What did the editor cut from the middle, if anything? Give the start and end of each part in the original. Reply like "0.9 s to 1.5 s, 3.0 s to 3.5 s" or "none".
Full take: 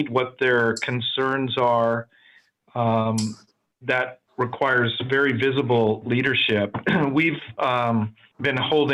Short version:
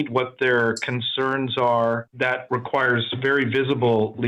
2.3 s to 4.2 s